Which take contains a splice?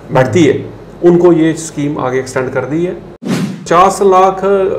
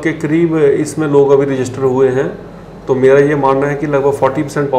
first; 1 cut; at 3.5 s

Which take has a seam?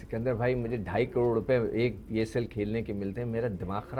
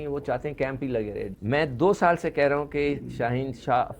second; 1 cut; at 1.2 s

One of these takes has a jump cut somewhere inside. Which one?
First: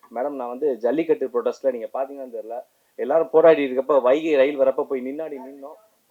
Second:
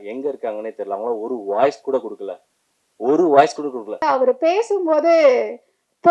second; 1 cut; at 4.0 s

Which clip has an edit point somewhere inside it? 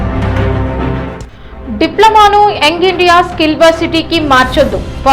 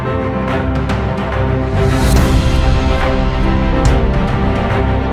first; 1 cut; at 0.9 s

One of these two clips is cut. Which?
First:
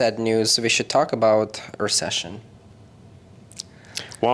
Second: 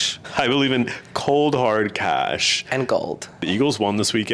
second; 1 cut; at 3.4 s

